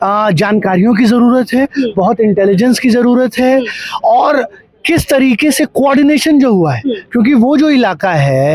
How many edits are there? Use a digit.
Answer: 0